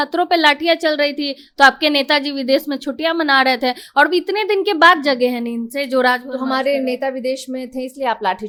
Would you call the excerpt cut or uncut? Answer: uncut